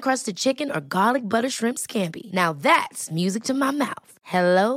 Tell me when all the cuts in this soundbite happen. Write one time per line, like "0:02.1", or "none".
none